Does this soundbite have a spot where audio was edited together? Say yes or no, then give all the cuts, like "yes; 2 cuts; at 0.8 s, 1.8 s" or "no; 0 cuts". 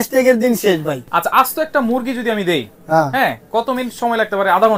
yes; 1 cut; at 1.0 s